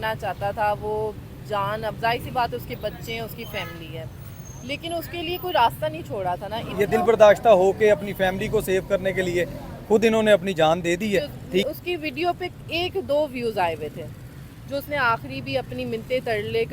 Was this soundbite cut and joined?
yes; 2 cuts; at 6.6 s, 11.6 s

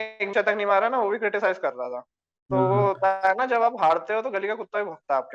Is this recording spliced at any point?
no; 0 cuts

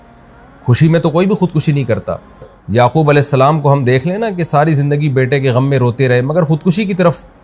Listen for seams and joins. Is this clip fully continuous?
no; 1 cut; at 2.6 s

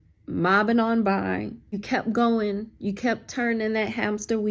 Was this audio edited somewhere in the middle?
yes; 1 cut; at 1.8 s

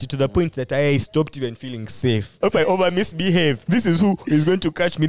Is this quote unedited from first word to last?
no; 2 cuts; at 2.4 s, 3.6 s

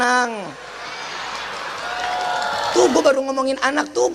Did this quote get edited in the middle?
yes; 1 cut; at 2.7 s

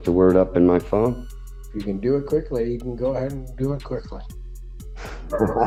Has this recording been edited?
no; 0 cuts

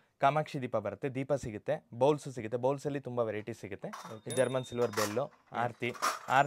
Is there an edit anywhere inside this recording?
no; 0 cuts

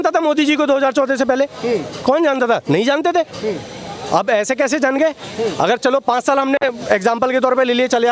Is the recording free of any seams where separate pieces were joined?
yes; 0 cuts

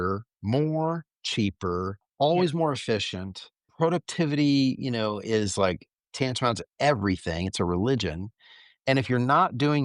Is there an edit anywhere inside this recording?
yes; 1 cut; at 2.0 s

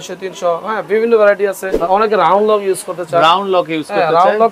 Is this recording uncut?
no; 1 cut; at 1.7 s

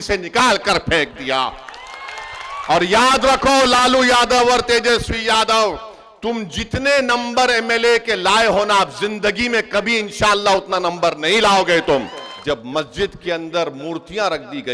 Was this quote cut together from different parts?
yes; 1 cut; at 12.2 s

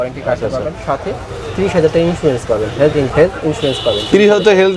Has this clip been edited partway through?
no; 0 cuts

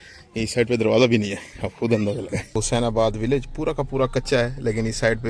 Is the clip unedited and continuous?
no; 1 cut; at 2.3 s

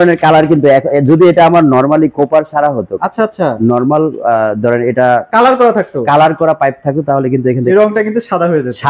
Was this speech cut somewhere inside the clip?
no; 0 cuts

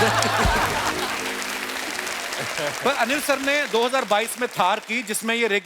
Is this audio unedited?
yes; 0 cuts

